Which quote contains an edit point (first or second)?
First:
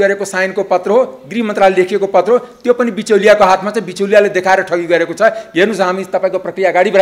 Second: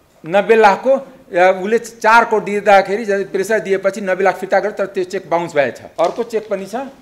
second